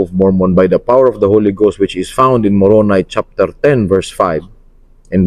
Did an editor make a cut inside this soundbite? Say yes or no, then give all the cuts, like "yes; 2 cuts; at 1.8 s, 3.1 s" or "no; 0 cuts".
no; 0 cuts